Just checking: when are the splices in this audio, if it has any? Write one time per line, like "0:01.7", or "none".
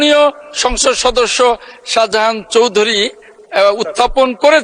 none